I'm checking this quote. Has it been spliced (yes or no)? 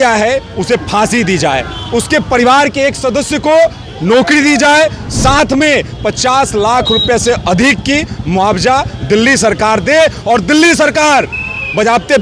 no